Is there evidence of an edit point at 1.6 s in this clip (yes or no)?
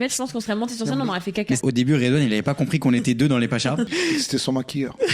yes